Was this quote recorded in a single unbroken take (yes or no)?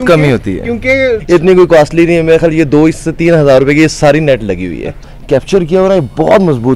no